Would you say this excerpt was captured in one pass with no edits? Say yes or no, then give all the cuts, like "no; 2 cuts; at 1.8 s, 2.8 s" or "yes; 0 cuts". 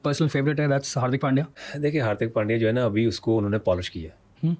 no; 1 cut; at 1.5 s